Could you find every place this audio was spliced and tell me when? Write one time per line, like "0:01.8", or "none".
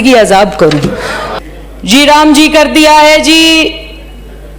0:01.4